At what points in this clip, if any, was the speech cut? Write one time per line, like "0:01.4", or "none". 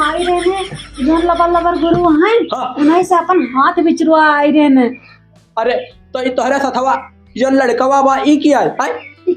none